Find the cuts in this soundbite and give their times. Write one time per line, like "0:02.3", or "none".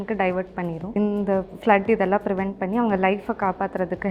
0:01.0